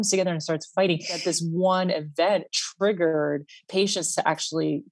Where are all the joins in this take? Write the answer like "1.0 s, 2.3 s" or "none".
1.2 s